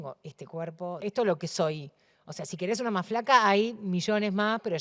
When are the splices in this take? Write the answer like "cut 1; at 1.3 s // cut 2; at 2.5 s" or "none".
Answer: cut 1; at 1.0 s